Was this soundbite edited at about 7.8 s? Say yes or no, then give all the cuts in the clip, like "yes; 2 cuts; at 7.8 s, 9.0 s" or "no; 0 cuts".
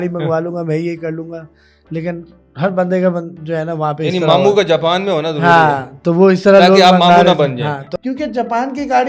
yes; 1 cut; at 7.8 s